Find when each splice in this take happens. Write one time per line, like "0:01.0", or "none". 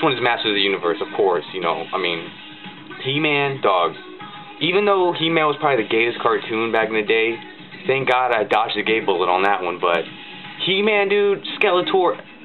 none

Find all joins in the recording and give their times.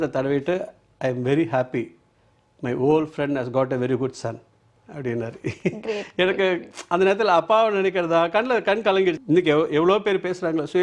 0:09.2

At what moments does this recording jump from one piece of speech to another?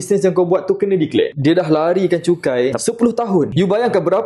0:01.3
0:02.8
0:03.5

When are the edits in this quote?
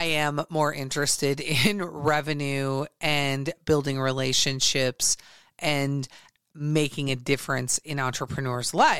none

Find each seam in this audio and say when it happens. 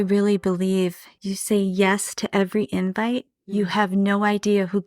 0:01.1

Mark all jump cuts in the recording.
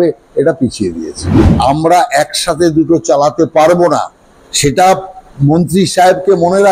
0:01.4

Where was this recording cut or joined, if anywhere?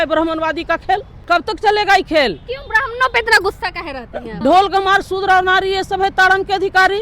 0:01.1
0:04.3

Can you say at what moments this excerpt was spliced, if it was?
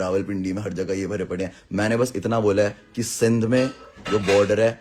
none

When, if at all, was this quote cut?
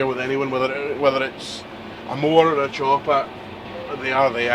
none

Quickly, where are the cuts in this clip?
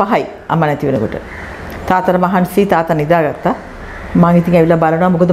none

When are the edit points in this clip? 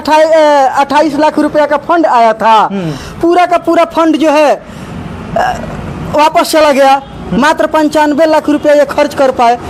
none

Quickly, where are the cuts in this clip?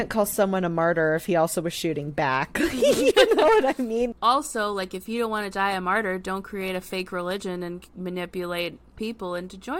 0:04.1
0:08.9

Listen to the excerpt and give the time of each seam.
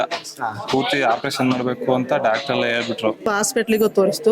0:03.3

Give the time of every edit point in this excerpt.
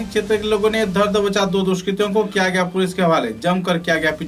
none

